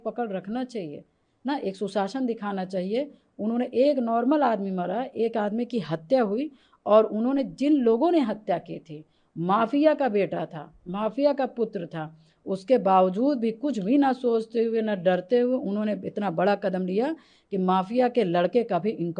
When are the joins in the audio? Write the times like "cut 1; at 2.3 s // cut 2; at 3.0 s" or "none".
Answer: none